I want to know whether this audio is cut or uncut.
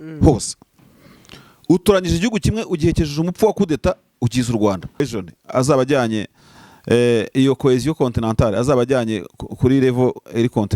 cut